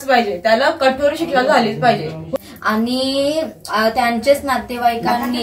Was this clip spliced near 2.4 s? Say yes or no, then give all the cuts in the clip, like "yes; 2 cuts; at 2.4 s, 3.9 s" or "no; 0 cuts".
yes; 1 cut; at 2.4 s